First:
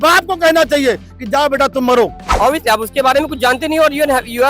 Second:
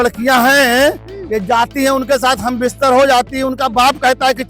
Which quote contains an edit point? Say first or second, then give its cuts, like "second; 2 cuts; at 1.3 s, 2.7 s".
first; 1 cut; at 2.2 s